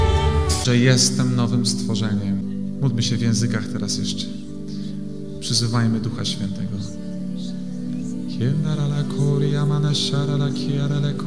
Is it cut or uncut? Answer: uncut